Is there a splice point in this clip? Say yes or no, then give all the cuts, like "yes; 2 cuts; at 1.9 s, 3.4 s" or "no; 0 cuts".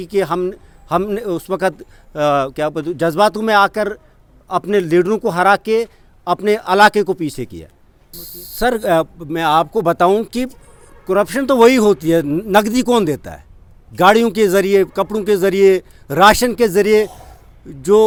no; 0 cuts